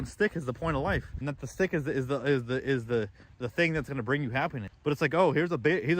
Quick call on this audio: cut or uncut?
cut